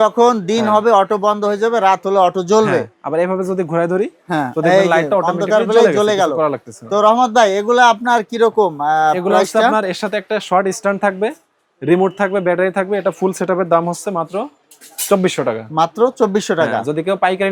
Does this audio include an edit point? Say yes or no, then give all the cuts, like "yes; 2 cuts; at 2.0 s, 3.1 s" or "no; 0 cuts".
no; 0 cuts